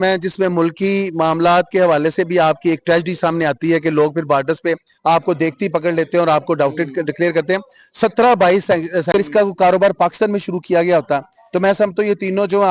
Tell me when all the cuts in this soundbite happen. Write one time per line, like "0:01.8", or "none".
0:09.1

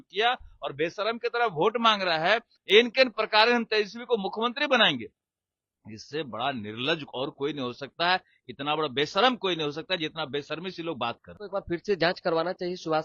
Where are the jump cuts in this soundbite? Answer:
0:02.5
0:11.3

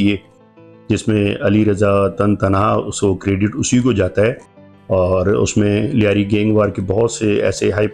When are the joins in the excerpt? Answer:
none

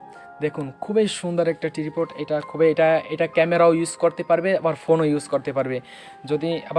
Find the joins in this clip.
none

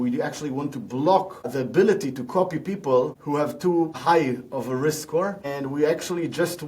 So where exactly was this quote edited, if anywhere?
0:01.5
0:03.5
0:05.5

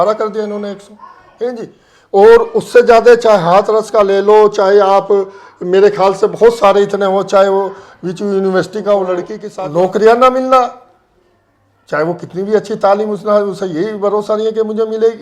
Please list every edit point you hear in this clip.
0:09.4

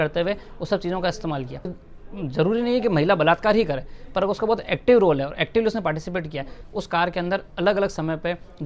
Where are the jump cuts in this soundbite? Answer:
0:01.8
0:06.6

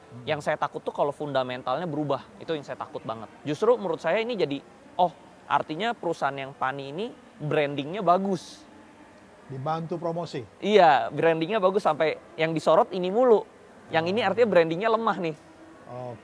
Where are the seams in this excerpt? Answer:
0:03.3

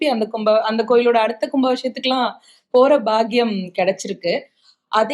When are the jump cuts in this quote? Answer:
none

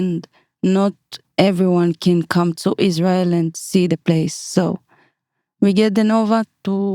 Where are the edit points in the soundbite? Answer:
none

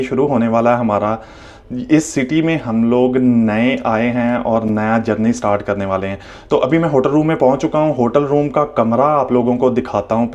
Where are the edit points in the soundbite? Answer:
none

